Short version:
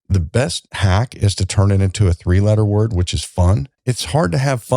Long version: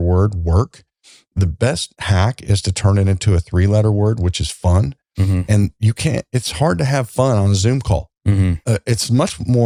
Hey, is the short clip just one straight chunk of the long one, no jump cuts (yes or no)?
no